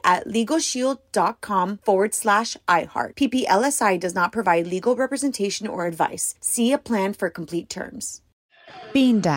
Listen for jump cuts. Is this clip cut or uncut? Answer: cut